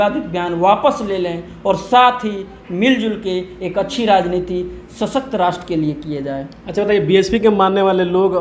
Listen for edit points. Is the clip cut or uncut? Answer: uncut